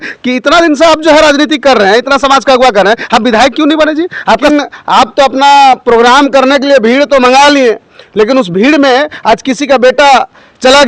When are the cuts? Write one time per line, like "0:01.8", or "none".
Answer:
0:04.5